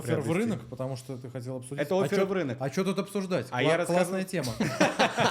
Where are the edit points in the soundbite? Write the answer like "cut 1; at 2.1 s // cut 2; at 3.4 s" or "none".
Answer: none